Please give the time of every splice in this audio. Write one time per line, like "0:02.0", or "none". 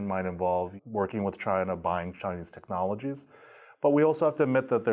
none